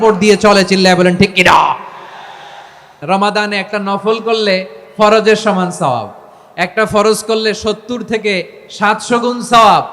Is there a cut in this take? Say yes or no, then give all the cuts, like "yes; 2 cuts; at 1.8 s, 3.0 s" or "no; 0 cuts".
yes; 1 cut; at 3.0 s